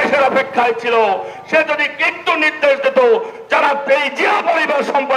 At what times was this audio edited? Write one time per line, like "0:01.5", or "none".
none